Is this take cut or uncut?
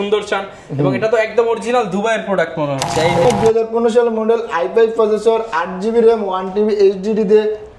cut